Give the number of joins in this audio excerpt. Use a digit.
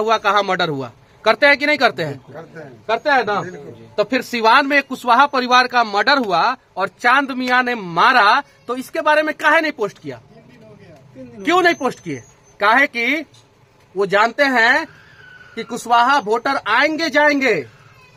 0